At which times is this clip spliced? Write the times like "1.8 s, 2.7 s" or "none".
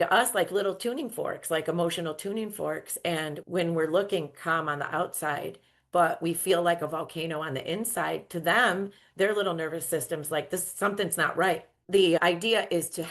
11.7 s